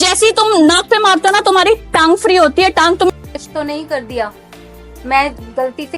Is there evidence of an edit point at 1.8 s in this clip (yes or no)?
no